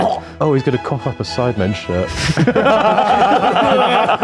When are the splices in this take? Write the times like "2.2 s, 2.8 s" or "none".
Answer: none